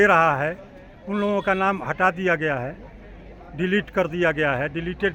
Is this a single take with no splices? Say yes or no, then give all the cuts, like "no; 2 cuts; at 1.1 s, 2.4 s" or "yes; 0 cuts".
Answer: yes; 0 cuts